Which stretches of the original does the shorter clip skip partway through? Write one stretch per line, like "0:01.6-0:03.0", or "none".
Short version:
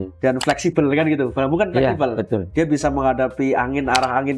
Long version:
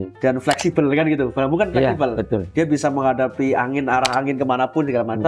none

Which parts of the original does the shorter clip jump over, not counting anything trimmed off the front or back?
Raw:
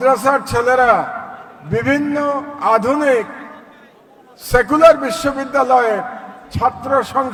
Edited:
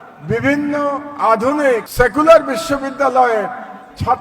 0:03.3-0:04.4

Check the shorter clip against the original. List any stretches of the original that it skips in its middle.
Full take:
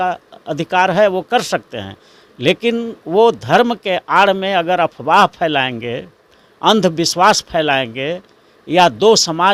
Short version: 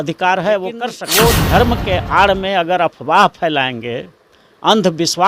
0:01.5-0:03.0

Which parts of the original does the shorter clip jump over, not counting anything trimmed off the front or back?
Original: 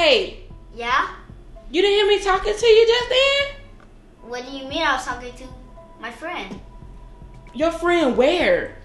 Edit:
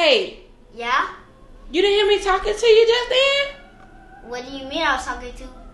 none

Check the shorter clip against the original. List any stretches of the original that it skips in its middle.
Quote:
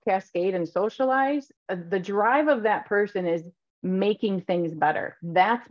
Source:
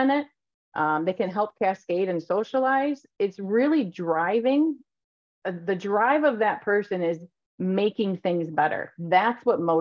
0:03.1-0:05.3

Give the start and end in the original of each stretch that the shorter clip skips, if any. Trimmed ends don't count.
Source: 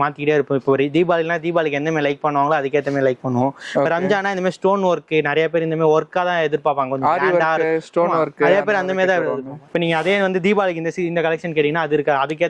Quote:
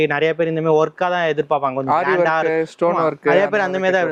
none

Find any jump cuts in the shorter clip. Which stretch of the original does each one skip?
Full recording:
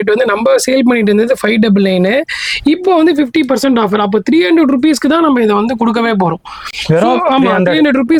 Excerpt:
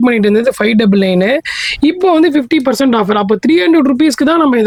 none

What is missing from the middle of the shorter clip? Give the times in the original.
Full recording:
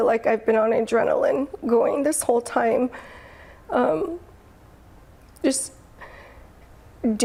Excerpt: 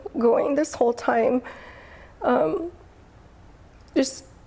none

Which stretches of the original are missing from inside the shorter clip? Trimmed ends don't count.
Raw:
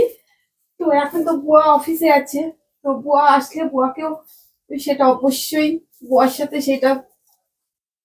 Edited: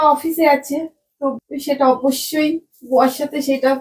0:03.0-0:04.6

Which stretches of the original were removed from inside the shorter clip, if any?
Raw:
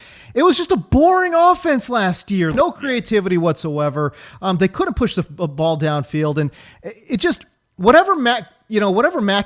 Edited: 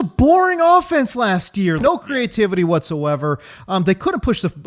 none

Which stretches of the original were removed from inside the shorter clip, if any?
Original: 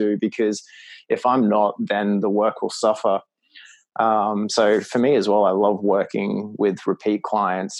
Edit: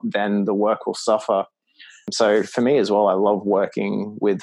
0:03.9-0:04.5

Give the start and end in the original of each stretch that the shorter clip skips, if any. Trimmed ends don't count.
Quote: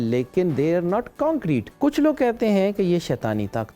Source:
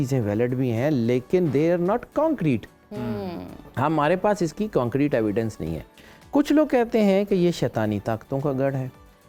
0:02.7-0:06.2

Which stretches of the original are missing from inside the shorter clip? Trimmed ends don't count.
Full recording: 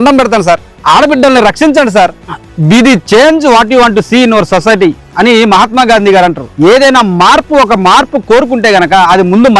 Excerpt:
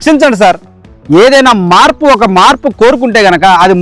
0:02.5-0:06.4

